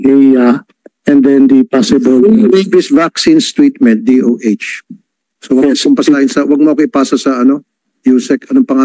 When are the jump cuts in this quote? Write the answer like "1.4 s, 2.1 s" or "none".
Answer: none